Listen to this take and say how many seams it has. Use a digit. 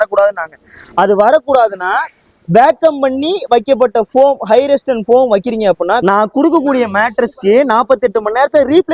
1